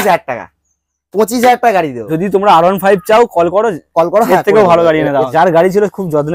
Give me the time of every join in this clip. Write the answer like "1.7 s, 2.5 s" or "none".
2.0 s, 5.3 s